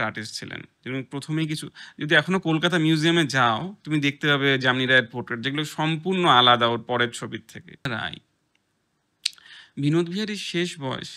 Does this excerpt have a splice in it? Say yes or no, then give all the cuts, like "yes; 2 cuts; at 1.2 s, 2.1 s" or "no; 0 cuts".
yes; 1 cut; at 7.9 s